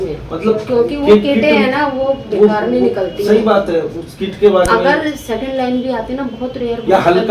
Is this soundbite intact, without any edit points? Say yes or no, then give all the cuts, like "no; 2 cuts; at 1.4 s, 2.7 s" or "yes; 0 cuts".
yes; 0 cuts